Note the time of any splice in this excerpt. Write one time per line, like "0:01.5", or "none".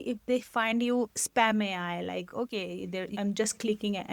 none